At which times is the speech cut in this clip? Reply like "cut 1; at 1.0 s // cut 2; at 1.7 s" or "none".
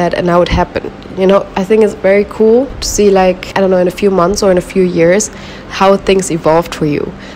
none

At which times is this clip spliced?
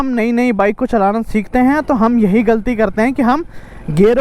none

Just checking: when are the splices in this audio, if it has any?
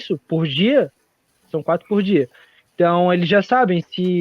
none

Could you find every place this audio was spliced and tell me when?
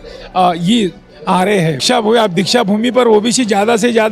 cut 1; at 1.8 s

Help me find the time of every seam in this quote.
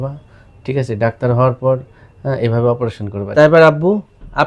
cut 1; at 3.3 s

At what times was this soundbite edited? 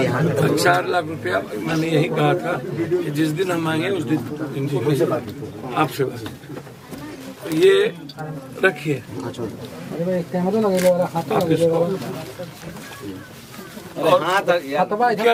none

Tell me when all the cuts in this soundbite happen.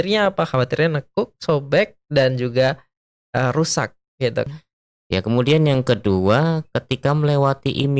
cut 1; at 4.5 s

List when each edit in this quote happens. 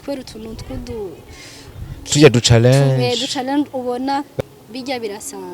cut 1; at 4.3 s

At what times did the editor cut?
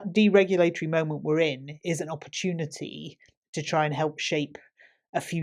none

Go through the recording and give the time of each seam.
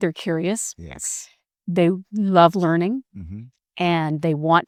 none

